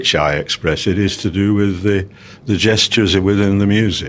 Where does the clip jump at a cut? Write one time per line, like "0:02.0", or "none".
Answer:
none